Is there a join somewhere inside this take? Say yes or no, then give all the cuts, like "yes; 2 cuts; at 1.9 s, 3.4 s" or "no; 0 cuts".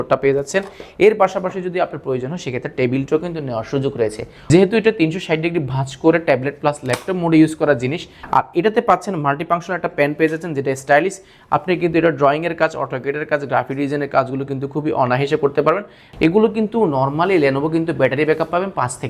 yes; 3 cuts; at 4.3 s, 8.1 s, 16.0 s